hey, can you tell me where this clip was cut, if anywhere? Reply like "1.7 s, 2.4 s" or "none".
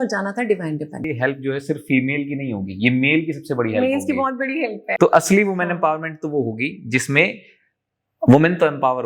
1.1 s, 4.8 s